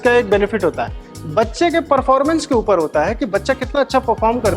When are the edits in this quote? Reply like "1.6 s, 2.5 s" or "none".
none